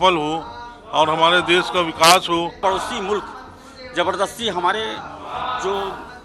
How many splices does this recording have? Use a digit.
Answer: 1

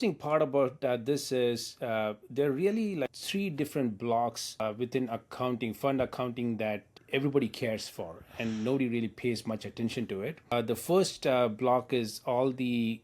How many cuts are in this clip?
4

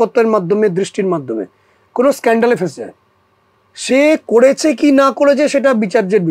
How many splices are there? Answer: 0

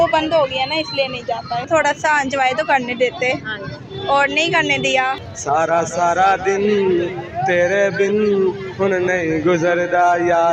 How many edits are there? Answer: 2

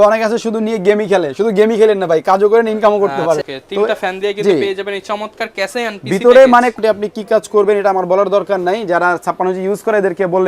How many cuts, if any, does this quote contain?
2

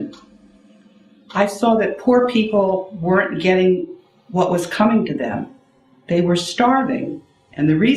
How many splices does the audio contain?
1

